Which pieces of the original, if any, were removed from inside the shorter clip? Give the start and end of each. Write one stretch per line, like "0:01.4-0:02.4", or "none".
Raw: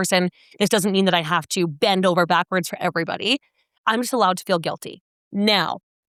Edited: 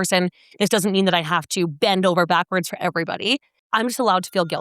0:03.5-0:03.7